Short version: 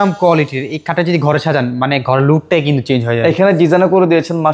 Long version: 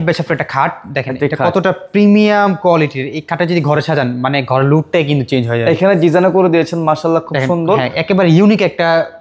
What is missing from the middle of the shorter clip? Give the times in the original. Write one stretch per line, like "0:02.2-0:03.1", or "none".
none